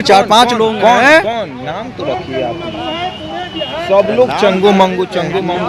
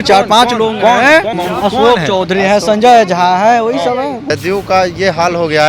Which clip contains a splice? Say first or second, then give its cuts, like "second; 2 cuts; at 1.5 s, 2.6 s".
second; 2 cuts; at 1.3 s, 4.2 s